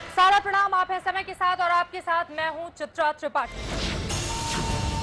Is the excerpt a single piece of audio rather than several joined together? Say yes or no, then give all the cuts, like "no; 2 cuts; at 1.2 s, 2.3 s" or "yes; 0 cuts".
yes; 0 cuts